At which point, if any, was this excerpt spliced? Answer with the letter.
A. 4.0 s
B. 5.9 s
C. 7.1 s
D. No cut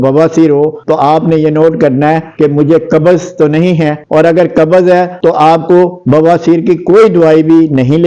D